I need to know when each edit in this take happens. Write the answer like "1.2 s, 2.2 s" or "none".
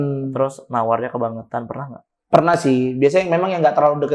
none